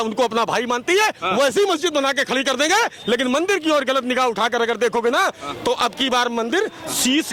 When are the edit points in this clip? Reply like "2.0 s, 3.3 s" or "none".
none